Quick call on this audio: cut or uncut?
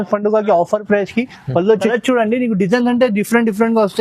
cut